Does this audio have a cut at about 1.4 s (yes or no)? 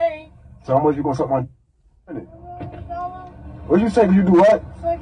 yes